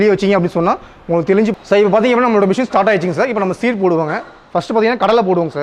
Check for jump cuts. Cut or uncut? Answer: cut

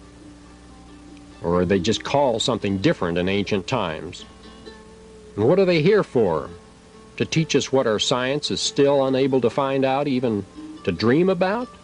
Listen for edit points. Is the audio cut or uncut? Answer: cut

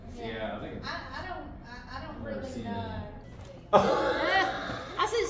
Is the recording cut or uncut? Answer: cut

